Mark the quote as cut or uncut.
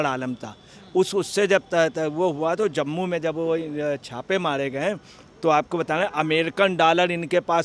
uncut